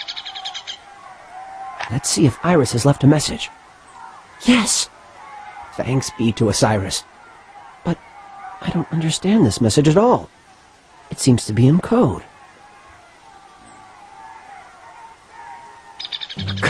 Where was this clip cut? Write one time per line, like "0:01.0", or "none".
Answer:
0:02.5

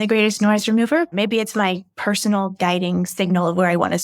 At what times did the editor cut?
0:01.1

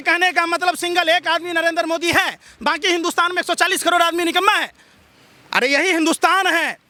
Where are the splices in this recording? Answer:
none

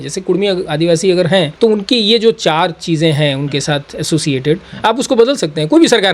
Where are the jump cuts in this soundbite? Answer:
0:01.5

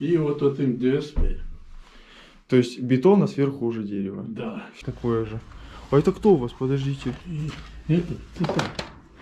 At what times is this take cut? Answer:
0:04.7

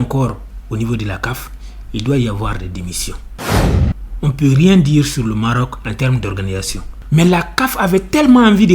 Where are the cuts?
0:03.6

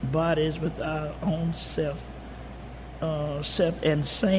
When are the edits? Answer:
none

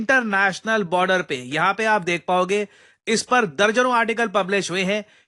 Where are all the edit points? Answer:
none

